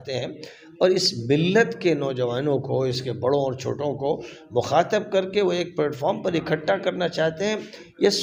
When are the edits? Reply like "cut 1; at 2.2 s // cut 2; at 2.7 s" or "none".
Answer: none